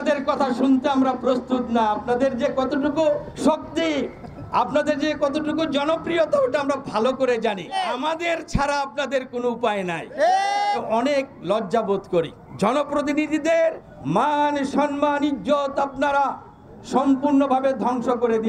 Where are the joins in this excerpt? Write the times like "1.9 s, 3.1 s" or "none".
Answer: 3.3 s, 7.7 s, 10.8 s, 12.4 s, 13.9 s